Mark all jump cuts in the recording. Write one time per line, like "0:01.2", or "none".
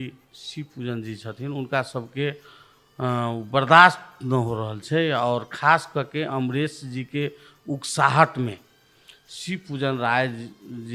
none